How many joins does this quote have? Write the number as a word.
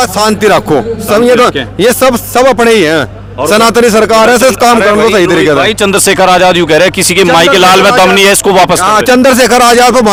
zero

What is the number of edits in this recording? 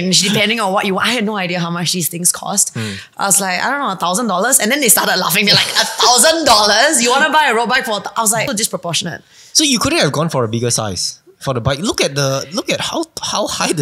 one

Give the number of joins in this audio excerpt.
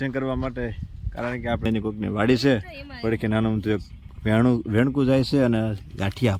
one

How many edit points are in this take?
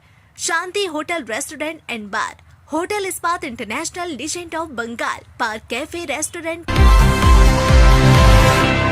one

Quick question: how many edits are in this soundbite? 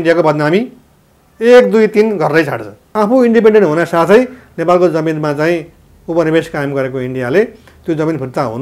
one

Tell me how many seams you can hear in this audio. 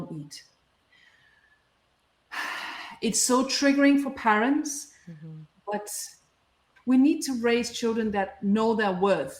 one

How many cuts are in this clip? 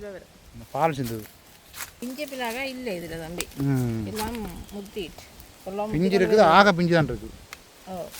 one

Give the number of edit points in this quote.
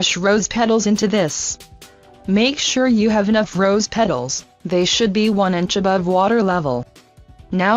one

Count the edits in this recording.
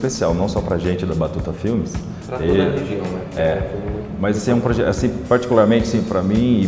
zero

